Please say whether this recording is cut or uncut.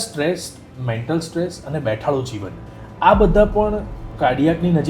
cut